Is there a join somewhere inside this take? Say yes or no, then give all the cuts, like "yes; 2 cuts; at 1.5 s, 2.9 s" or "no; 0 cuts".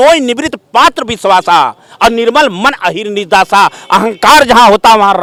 no; 0 cuts